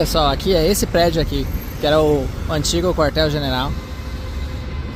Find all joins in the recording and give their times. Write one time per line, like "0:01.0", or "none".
none